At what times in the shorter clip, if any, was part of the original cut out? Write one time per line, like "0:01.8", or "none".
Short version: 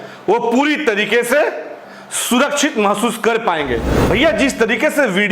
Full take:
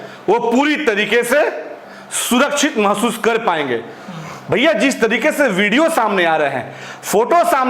0:03.9